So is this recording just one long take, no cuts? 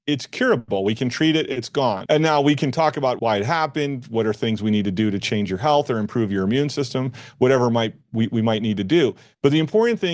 no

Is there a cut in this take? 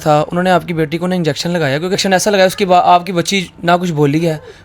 yes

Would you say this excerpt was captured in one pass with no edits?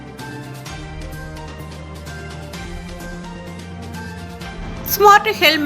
yes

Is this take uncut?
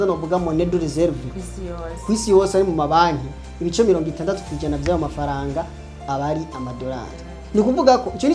yes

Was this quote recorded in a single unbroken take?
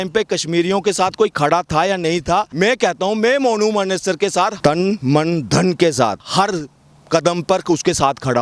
no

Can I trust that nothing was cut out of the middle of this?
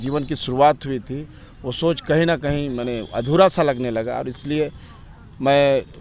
yes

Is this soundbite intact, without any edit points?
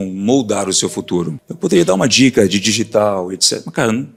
yes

